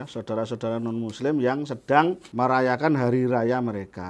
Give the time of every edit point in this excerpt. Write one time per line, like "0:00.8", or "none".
0:02.2